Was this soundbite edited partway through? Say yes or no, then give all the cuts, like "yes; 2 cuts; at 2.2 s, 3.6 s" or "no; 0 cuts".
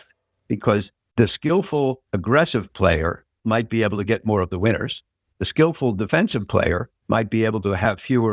yes; 3 cuts; at 1.6 s, 3.3 s, 6.9 s